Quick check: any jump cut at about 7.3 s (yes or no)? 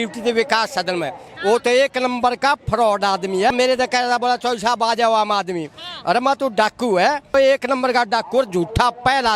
yes